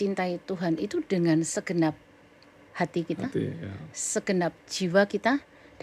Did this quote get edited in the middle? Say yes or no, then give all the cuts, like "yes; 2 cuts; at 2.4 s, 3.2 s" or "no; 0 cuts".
no; 0 cuts